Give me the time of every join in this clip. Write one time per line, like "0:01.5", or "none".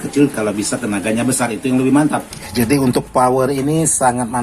0:02.5